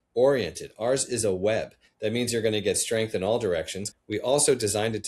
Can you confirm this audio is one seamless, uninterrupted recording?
no; 2 cuts; at 1.8 s, 3.9 s

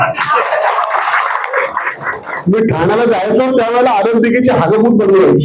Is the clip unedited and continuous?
yes; 0 cuts

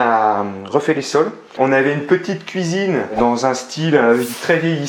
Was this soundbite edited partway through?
yes; 1 cut; at 1.5 s

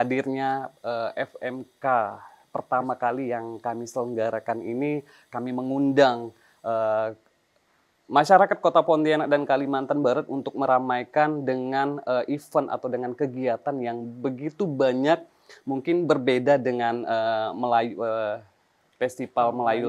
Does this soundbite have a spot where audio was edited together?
no; 0 cuts

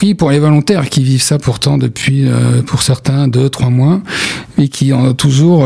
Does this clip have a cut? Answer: no; 0 cuts

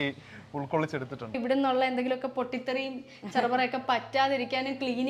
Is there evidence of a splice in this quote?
yes; 1 cut; at 1.4 s

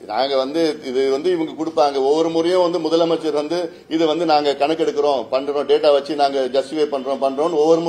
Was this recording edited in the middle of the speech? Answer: no; 0 cuts

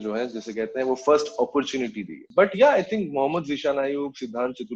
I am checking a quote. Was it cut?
no; 0 cuts

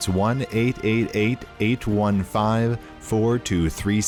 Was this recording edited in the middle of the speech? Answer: no; 0 cuts

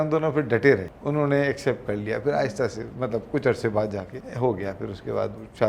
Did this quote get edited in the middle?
yes; 2 cuts; at 1.0 s, 4.2 s

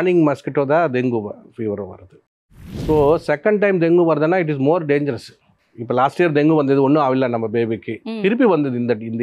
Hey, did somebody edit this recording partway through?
yes; 1 cut; at 2.4 s

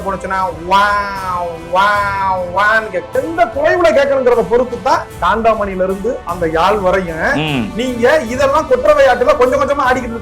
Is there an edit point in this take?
yes; 2 cuts; at 3.2 s, 5.1 s

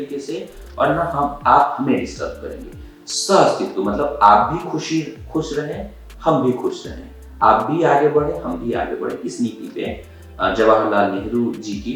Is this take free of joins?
yes; 0 cuts

